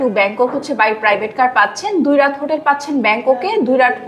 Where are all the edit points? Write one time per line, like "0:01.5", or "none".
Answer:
none